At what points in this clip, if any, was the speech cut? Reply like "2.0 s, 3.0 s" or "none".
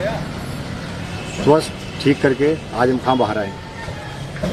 none